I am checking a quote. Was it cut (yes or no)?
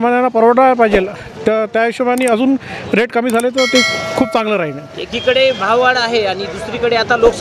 no